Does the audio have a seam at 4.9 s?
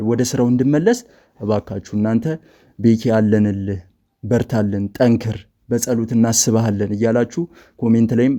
no; 0 cuts

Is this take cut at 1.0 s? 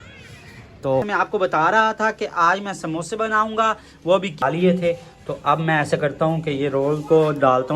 yes; 2 cuts; at 1.0 s, 4.4 s

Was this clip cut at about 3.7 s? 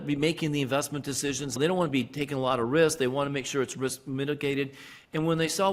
no; 1 cut; at 1.6 s

